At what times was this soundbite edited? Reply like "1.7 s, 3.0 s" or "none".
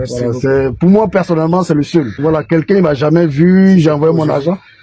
2.2 s